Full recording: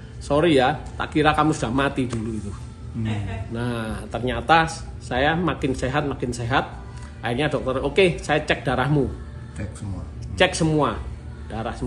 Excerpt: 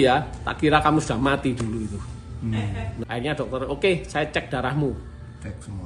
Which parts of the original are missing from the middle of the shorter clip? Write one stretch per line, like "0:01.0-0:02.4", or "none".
0:03.6-0:07.2